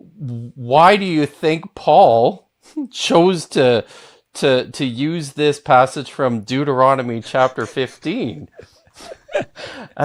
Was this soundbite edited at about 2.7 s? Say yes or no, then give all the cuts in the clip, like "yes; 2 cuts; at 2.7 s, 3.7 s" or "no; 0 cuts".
no; 0 cuts